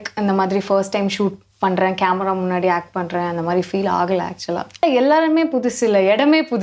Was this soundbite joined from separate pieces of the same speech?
yes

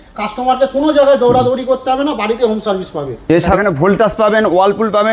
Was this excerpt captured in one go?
no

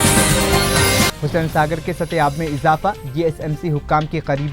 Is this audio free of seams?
no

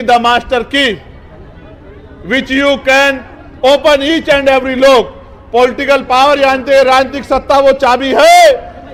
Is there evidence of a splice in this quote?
no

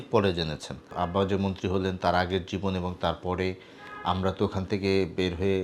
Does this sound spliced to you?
yes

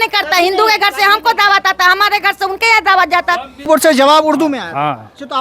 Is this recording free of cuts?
no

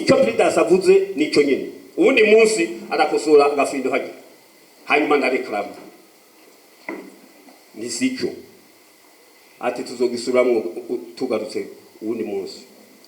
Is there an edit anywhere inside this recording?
no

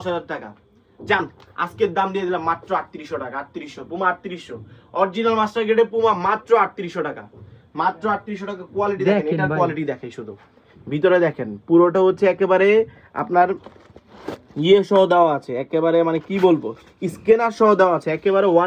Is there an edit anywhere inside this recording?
no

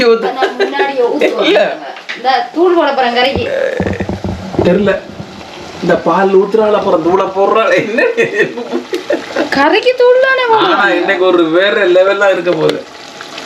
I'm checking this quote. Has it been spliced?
no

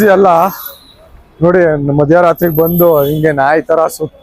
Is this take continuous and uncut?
yes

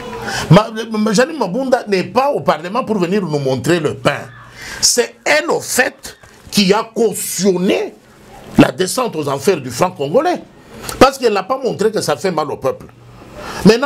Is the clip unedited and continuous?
yes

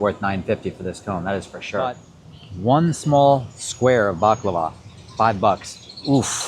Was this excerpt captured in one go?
no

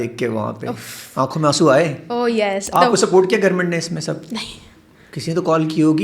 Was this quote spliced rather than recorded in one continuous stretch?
yes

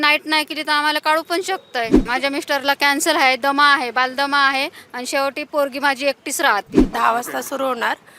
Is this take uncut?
no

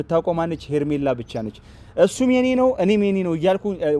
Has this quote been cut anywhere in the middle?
no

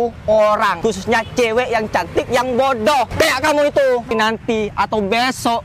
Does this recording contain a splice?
yes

